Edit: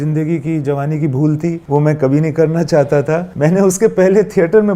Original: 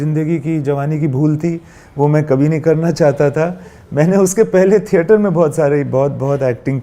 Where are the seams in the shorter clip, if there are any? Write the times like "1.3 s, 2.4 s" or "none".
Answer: 1.6 s, 3.3 s

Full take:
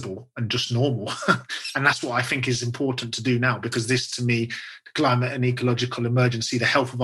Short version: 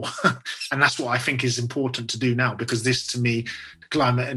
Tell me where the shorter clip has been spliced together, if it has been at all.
none

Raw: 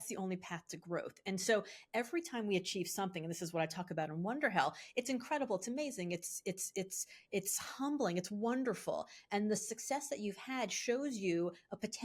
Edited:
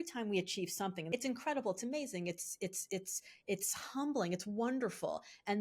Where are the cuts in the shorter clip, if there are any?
1.0 s

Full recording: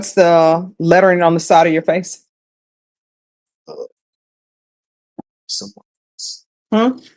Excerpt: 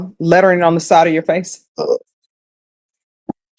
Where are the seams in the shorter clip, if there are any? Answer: 1.6 s

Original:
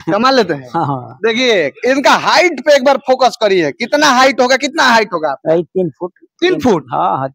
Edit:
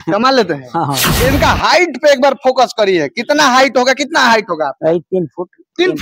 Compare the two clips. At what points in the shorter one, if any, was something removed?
1.1 s

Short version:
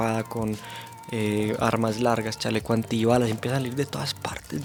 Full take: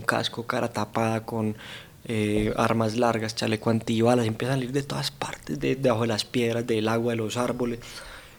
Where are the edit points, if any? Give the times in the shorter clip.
none

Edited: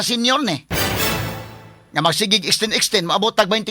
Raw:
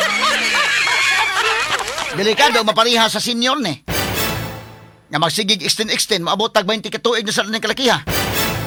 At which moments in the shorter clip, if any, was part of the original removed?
none

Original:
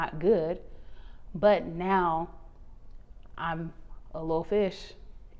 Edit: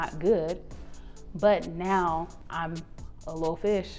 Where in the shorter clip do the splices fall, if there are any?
2.4 s

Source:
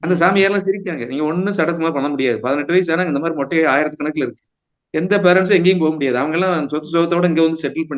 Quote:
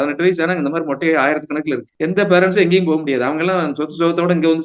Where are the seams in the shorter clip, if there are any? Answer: 1.9 s

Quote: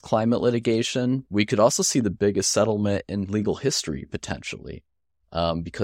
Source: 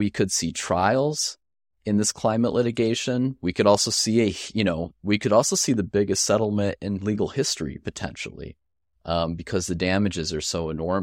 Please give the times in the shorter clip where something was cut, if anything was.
1.2 s

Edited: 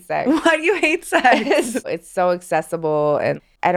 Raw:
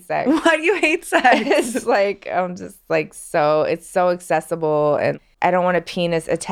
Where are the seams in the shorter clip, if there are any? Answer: 1.9 s

